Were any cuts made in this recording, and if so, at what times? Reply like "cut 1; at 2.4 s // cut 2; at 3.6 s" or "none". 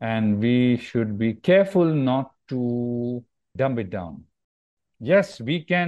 cut 1; at 3.5 s // cut 2; at 4.8 s